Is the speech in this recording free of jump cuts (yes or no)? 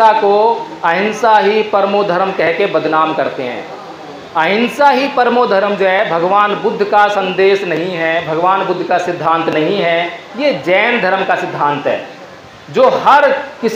yes